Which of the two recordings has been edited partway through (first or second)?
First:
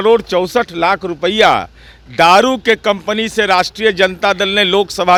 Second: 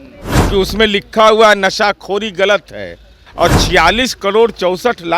second